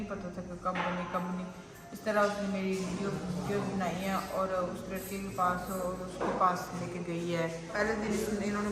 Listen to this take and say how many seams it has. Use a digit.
1